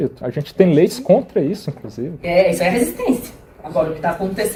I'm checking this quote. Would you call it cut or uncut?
uncut